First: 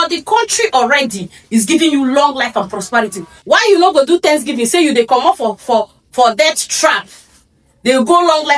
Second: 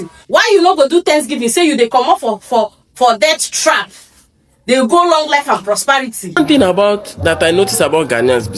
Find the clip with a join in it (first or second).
second